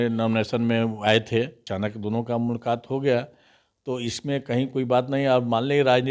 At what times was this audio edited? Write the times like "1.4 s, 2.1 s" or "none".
1.6 s